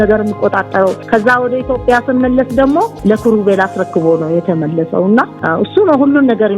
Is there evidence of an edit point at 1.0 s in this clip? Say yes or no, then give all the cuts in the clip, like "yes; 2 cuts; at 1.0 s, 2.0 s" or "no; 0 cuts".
yes; 3 cuts; at 1.0 s, 2.9 s, 5.4 s